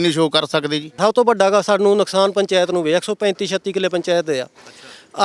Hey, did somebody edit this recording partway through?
yes; 1 cut; at 1.0 s

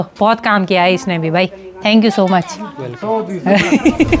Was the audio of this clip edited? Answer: no; 0 cuts

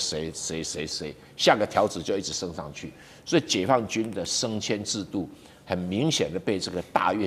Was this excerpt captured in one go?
yes; 0 cuts

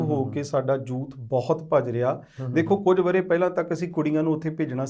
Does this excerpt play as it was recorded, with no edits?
yes; 0 cuts

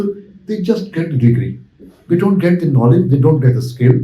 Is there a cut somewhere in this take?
no; 0 cuts

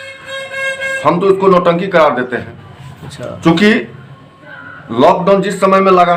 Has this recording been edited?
no; 0 cuts

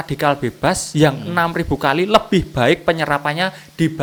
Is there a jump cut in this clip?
no; 0 cuts

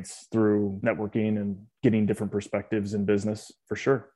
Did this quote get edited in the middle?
no; 0 cuts

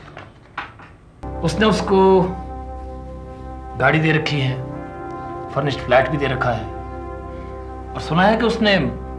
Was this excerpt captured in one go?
no; 1 cut; at 1.2 s

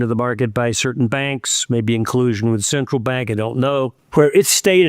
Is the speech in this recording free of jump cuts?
no; 1 cut; at 4.0 s

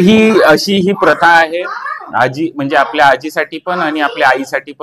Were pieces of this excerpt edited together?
no; 0 cuts

